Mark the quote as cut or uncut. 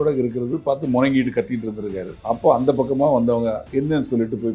cut